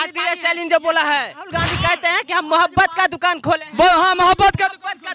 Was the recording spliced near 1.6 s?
yes; 1 cut; at 1.6 s

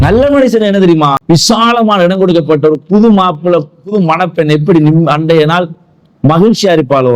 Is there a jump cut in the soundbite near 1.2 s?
yes; 1 cut; at 1.2 s

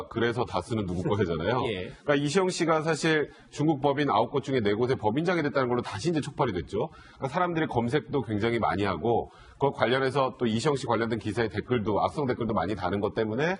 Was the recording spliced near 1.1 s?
no; 0 cuts

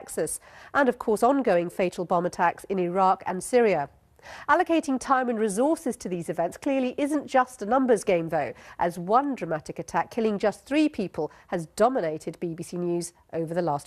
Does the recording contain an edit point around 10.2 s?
no; 1 cut; at 8.0 s

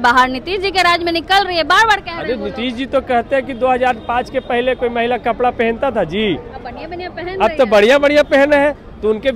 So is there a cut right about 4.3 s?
no; 0 cuts

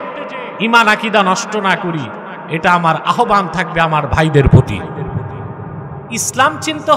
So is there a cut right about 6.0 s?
yes; 1 cut; at 6.0 s

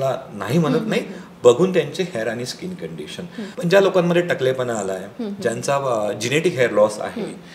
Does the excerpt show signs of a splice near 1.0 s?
no; 1 cut; at 3.4 s

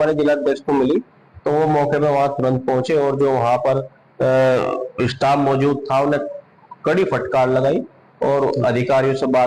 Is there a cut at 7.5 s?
no; 0 cuts

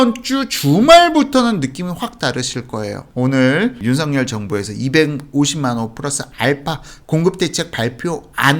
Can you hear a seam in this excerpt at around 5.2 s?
no; 1 cut; at 3.0 s

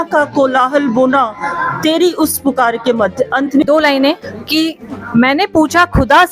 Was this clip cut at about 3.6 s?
yes; 1 cut; at 3.6 s

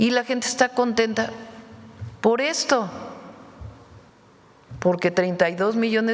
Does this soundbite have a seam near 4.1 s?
yes; 1 cut; at 4.1 s

